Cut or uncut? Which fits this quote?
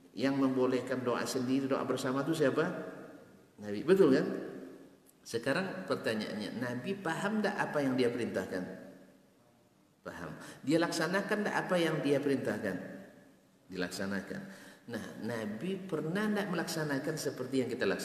uncut